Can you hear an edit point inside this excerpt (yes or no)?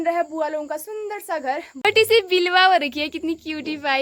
yes